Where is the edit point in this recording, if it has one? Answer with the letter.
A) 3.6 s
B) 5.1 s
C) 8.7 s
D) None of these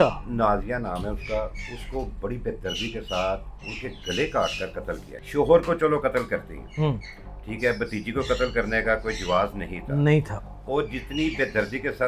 B